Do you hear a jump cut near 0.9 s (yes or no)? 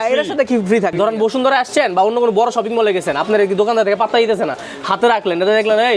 yes